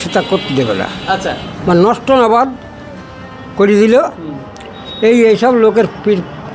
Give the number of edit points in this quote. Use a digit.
0